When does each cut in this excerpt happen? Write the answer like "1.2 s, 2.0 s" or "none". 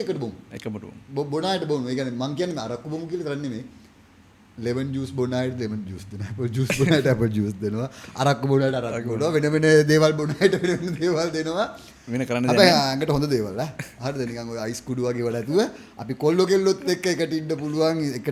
none